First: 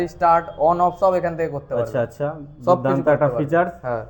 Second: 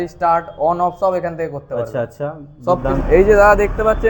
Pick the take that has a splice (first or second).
second